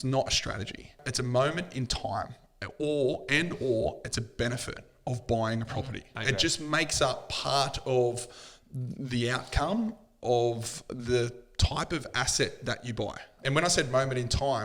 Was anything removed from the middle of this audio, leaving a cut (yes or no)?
yes